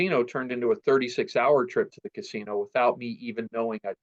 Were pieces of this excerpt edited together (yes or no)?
no